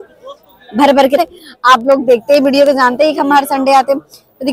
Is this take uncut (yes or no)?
no